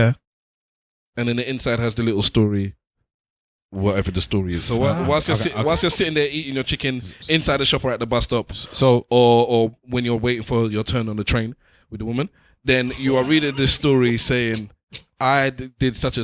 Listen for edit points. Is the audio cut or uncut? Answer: uncut